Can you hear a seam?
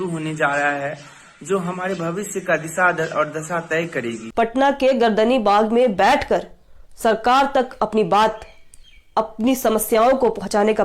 yes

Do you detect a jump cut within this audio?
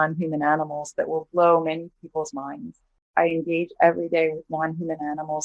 yes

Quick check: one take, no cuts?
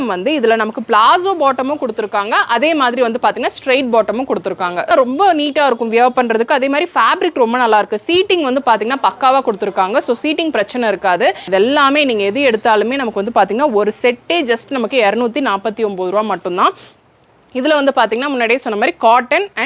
no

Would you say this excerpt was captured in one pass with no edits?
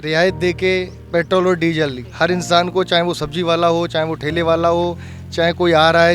no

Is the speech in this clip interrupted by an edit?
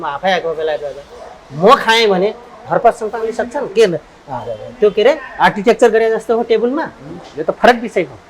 no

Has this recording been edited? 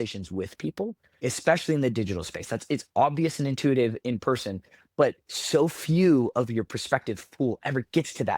yes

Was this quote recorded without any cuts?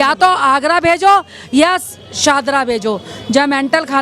yes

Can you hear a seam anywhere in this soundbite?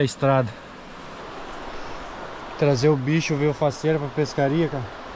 yes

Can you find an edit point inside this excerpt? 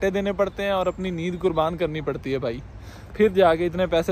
no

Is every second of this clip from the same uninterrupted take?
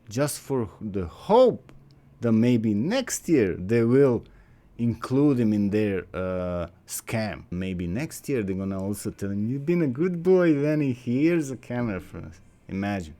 no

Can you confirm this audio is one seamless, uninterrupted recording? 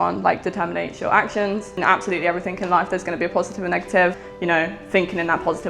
no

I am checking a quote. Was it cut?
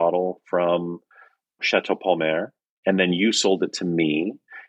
yes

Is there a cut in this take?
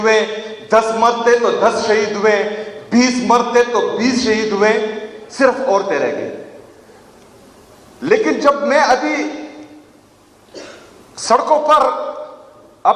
no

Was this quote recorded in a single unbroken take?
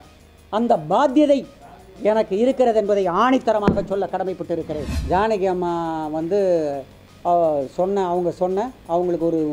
no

